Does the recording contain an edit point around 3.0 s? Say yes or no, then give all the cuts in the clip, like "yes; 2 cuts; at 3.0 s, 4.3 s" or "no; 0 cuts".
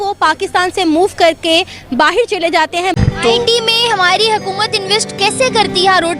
yes; 1 cut; at 3.0 s